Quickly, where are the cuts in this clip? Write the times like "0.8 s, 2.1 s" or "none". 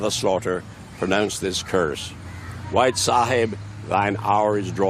none

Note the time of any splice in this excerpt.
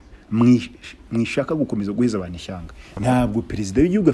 2.8 s

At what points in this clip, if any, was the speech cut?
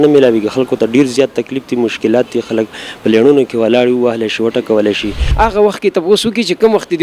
5.2 s

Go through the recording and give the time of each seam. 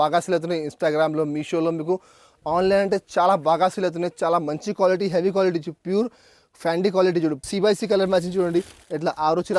7.4 s

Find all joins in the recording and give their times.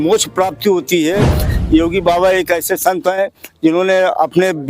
1.4 s

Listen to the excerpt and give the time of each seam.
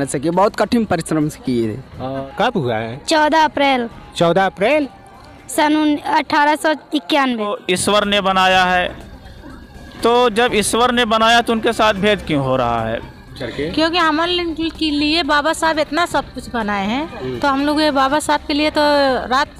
2.3 s, 7.6 s, 13.2 s

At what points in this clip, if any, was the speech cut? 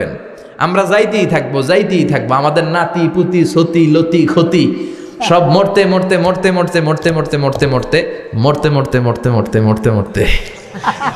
none

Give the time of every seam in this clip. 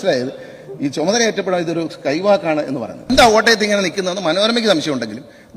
3.1 s

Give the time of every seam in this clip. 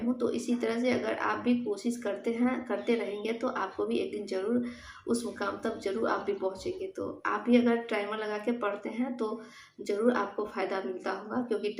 none

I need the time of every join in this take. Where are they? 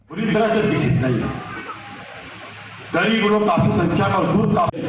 none

